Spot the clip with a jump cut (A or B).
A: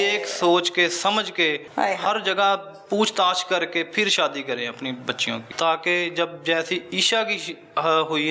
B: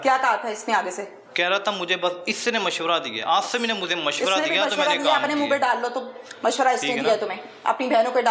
A